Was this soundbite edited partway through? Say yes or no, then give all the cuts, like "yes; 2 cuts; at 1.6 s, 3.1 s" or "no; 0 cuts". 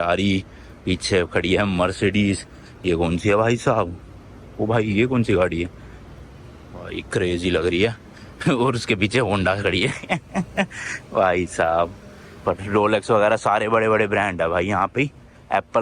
no; 0 cuts